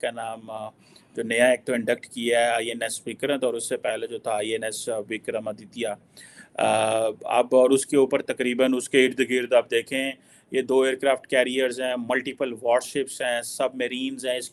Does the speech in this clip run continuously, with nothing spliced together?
yes; 0 cuts

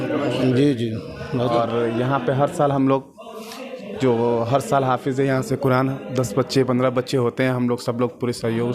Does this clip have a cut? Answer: yes; 1 cut; at 1.5 s

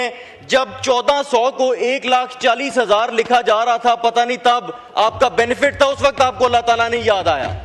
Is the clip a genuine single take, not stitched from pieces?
yes; 0 cuts

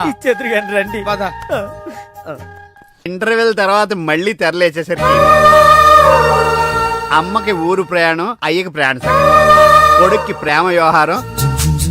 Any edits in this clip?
yes; 1 cut; at 3.1 s

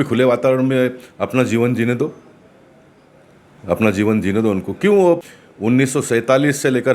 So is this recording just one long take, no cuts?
no; 1 cut; at 5.4 s

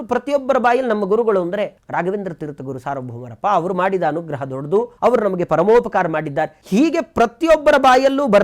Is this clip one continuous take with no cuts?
no; 3 cuts; at 1.8 s, 4.9 s, 6.6 s

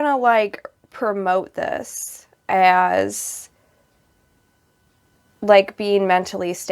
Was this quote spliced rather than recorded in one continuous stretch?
no; 0 cuts

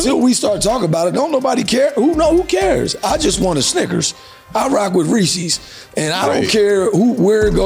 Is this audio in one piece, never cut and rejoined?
yes; 0 cuts

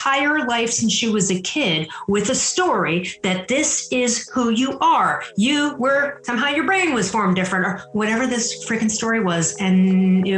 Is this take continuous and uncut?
no; 1 cut; at 6.2 s

